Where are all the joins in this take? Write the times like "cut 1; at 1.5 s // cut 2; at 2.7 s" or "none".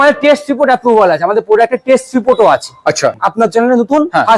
cut 1; at 3.2 s